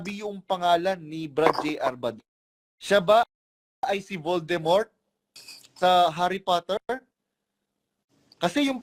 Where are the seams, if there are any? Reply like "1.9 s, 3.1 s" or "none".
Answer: none